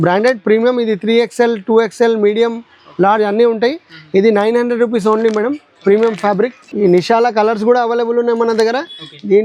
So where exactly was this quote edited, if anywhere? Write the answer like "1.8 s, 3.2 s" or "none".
none